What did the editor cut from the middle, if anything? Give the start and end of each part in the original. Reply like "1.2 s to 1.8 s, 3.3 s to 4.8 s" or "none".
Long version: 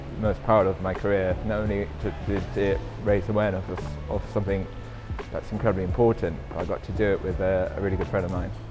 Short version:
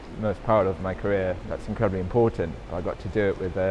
1.4 s to 5.2 s